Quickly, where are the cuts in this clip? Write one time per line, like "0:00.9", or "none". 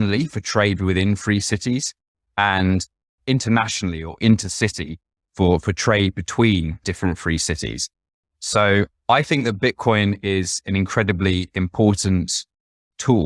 0:06.8